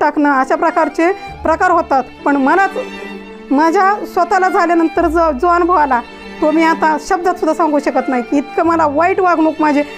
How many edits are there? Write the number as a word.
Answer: zero